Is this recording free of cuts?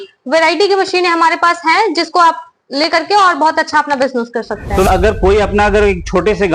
no; 1 cut; at 4.9 s

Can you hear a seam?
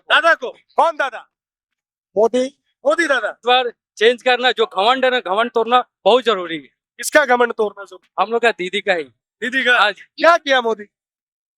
yes; 2 cuts; at 3.4 s, 10.1 s

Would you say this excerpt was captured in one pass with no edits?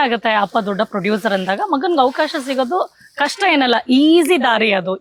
yes; 0 cuts

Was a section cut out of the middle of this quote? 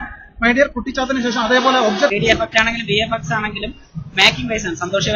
yes; 1 cut; at 2.1 s

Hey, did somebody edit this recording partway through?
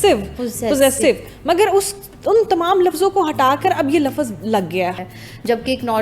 yes; 1 cut; at 5.0 s

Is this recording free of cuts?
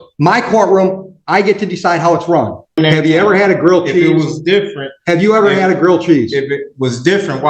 no; 1 cut; at 2.8 s

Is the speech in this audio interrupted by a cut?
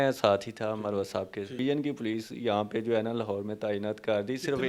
yes; 1 cut; at 1.6 s

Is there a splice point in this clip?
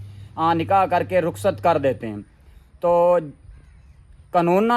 no; 0 cuts

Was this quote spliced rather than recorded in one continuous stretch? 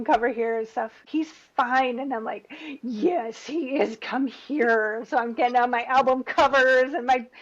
yes; 1 cut; at 1.0 s

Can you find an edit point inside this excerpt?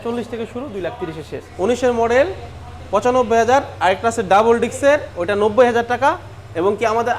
yes; 1 cut; at 1.5 s

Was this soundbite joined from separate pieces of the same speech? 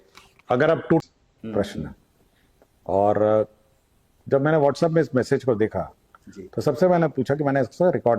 yes; 1 cut; at 1.0 s

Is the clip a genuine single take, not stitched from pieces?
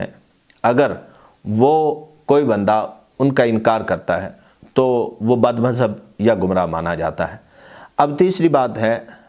yes; 0 cuts

